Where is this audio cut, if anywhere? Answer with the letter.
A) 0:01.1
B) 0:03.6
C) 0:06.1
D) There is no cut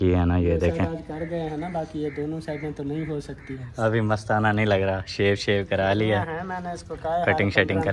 B